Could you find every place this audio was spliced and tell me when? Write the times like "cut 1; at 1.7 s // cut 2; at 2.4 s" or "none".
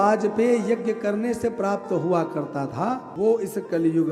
cut 1; at 3.1 s